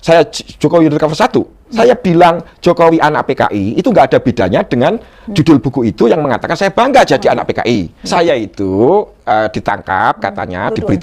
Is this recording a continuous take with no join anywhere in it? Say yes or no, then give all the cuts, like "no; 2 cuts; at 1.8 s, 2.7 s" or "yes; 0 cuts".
no; 2 cuts; at 1.6 s, 8.0 s